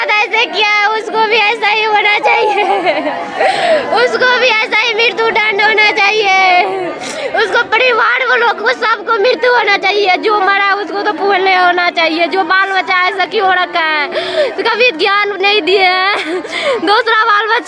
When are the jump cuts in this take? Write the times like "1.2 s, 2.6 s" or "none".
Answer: none

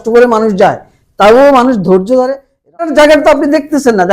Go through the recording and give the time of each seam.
2.8 s

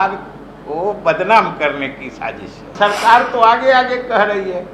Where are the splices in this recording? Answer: 2.6 s

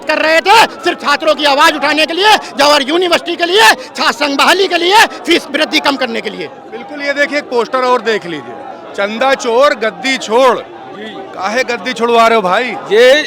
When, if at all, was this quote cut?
none

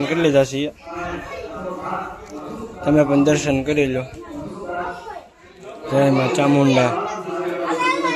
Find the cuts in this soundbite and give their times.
none

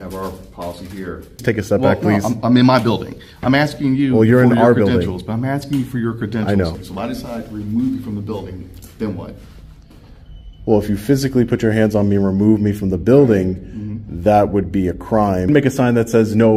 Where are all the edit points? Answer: 1.4 s, 6.8 s, 15.5 s

